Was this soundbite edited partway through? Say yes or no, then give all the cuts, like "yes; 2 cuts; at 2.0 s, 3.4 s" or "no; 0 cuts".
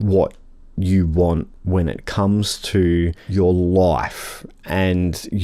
yes; 1 cut; at 3.2 s